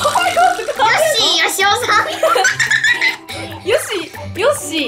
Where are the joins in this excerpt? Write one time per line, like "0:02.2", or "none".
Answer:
none